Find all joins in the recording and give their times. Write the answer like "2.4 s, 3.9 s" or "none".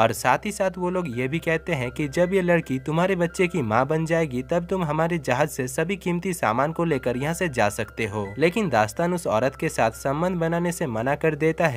8.3 s